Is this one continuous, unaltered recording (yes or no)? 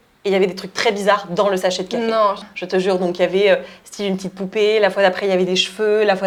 yes